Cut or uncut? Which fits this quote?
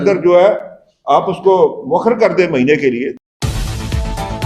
cut